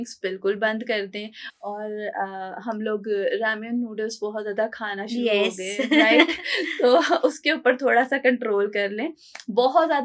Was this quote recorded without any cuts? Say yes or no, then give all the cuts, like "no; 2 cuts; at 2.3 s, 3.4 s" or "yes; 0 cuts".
yes; 0 cuts